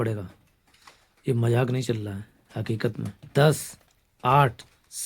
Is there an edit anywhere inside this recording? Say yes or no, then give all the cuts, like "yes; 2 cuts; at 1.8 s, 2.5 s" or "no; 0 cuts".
yes; 1 cut; at 3.2 s